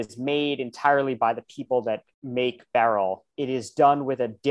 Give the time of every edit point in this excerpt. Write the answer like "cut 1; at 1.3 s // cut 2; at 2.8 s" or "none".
cut 1; at 2.1 s // cut 2; at 3.3 s